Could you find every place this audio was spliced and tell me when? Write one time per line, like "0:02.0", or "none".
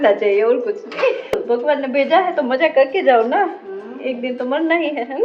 0:01.3